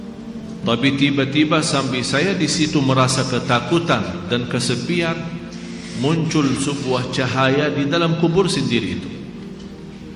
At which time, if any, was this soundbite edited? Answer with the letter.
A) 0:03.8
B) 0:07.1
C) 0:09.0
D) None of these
C